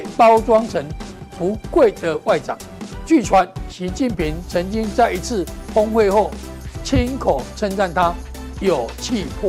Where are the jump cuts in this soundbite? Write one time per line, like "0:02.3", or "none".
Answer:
none